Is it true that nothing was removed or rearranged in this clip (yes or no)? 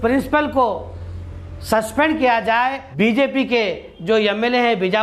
no